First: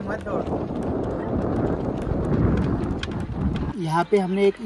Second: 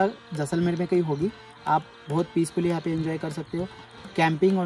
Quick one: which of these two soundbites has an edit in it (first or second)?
first